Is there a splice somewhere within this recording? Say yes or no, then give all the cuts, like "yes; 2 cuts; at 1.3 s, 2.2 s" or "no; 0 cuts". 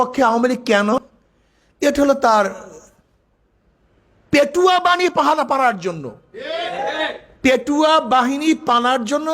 yes; 1 cut; at 0.9 s